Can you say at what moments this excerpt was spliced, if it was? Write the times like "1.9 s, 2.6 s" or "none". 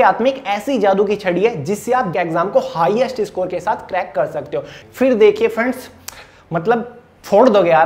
2.1 s, 4.9 s